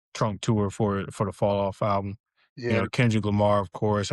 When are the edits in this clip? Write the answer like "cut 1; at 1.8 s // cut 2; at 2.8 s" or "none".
cut 1; at 2.7 s

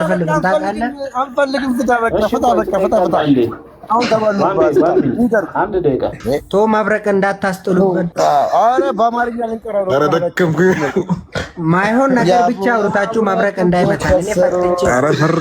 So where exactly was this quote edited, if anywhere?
cut 1; at 6.2 s // cut 2; at 8.1 s

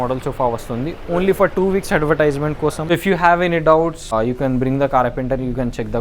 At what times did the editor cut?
cut 1; at 2.8 s // cut 2; at 4.1 s

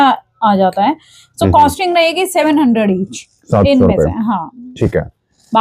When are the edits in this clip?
none

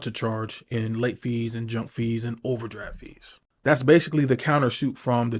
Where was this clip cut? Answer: none

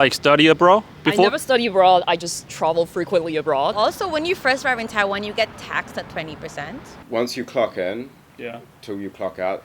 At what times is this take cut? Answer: cut 1; at 3.8 s // cut 2; at 6.9 s

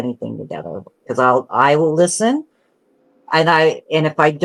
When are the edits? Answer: none

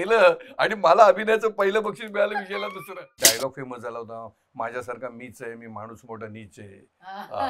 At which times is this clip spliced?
cut 1; at 3.2 s

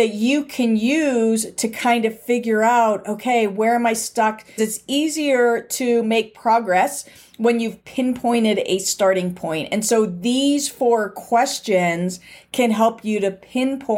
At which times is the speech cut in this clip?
cut 1; at 4.6 s

